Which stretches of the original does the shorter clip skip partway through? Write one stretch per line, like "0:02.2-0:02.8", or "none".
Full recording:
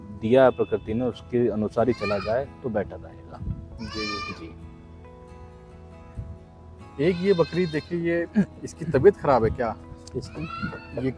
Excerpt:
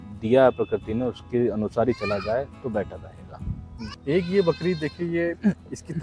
0:03.9-0:06.8